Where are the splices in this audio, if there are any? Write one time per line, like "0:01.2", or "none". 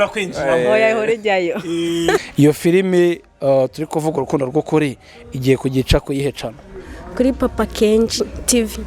0:02.3